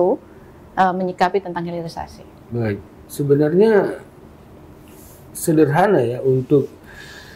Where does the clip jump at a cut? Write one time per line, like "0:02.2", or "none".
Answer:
none

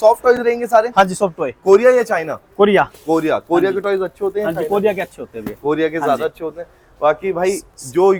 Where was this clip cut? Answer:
none

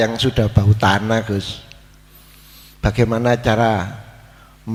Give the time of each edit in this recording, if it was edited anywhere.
none

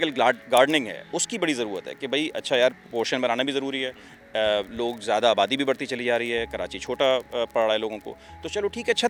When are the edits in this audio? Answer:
none

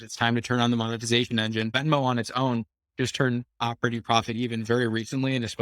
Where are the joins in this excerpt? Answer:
0:01.7

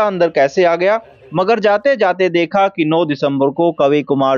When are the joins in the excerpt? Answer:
0:01.2

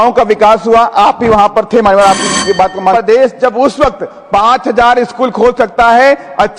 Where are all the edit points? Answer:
0:02.9

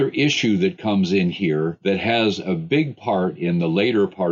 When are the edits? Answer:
0:01.8

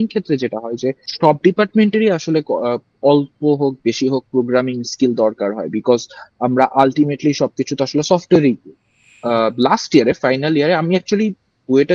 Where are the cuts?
0:01.0
0:09.1

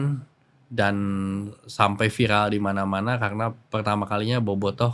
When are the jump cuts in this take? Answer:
none

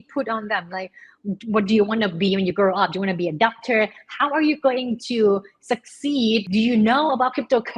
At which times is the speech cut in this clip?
0:06.5

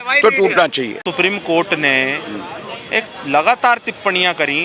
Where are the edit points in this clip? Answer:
0:01.0

